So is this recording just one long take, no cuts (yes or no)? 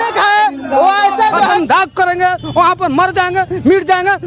no